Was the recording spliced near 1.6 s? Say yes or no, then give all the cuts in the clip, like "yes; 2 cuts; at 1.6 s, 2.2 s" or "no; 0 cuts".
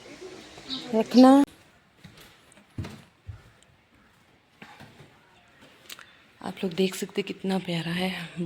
yes; 1 cut; at 1.6 s